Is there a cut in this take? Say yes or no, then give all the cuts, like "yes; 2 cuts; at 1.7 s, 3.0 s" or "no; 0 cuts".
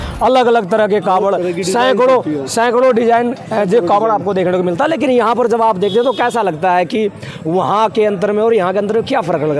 no; 0 cuts